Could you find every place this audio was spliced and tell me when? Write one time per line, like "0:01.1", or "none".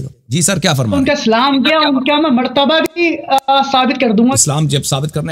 0:04.4